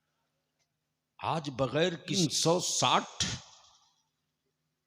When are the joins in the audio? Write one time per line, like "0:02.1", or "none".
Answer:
0:02.2